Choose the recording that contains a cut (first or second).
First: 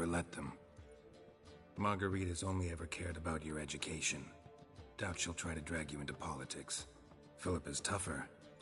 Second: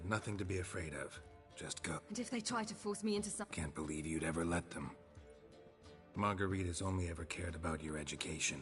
second